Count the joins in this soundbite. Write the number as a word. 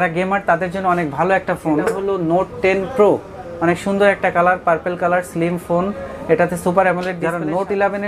two